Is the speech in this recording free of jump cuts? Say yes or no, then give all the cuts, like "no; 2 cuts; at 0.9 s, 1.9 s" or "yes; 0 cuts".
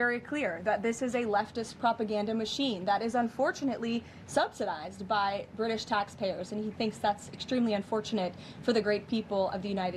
yes; 0 cuts